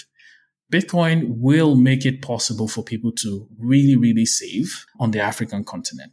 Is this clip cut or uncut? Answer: cut